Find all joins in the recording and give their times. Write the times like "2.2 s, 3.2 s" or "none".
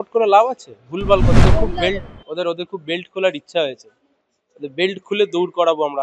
1.4 s